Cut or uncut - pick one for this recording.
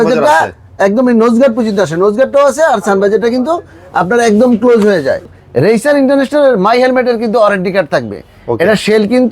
cut